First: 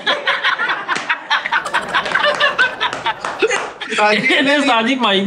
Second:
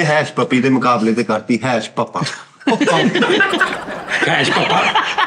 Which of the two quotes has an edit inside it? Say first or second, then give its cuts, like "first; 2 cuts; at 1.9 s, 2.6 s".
first; 1 cut; at 3.8 s